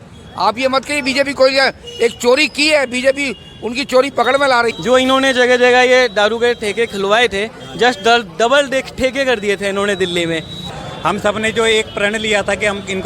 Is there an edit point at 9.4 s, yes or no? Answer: no